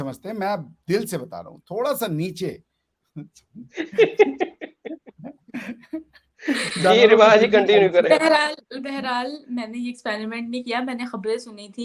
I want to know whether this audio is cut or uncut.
uncut